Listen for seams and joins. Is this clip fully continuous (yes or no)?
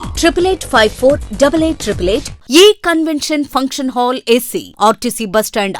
no